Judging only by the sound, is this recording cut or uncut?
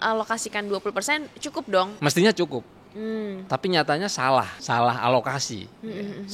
cut